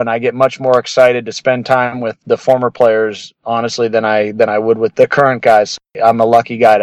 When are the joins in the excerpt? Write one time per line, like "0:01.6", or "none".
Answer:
none